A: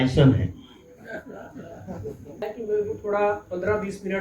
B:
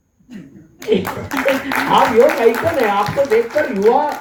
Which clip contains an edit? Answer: A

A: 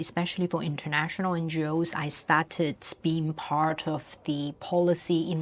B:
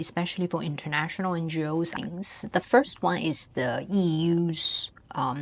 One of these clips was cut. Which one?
B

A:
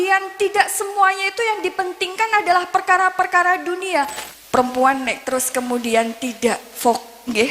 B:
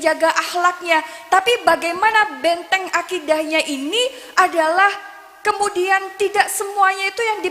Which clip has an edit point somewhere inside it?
A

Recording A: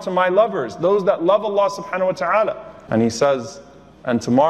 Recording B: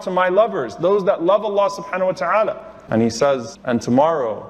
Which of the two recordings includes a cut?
B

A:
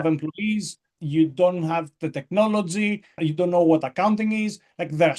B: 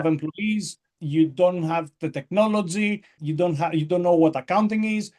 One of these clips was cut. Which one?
A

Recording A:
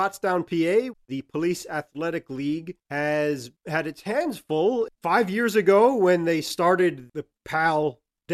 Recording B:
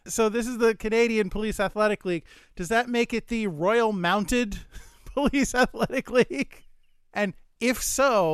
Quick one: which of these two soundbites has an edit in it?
A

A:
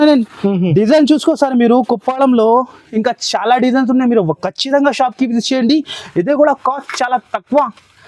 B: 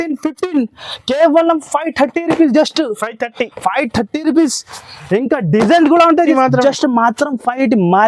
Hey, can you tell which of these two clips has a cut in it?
B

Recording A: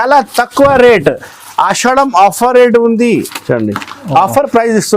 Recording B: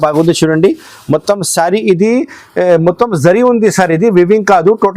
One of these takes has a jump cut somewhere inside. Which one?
A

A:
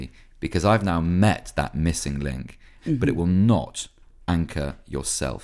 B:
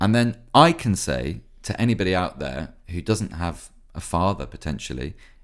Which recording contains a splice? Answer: A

